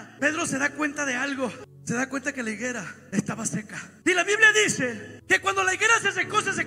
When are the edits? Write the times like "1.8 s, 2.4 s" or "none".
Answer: 1.6 s, 3.0 s, 3.8 s, 5.1 s